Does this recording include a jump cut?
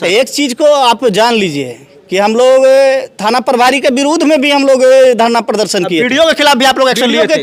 no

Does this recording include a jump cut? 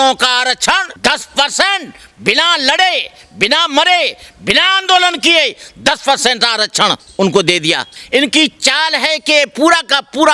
yes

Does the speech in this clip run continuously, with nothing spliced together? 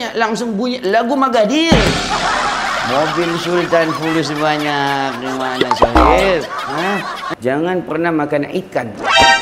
no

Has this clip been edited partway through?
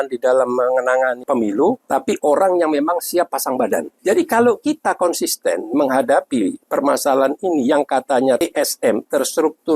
yes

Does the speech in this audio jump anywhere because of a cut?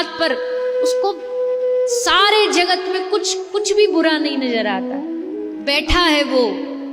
yes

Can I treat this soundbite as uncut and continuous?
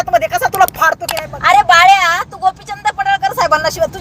no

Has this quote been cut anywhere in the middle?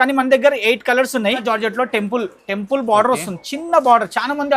yes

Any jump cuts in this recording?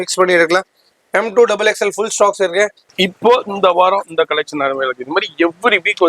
yes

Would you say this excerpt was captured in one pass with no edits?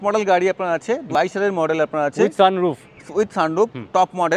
no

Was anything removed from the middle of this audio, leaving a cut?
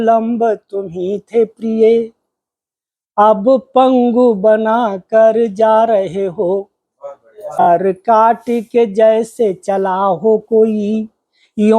yes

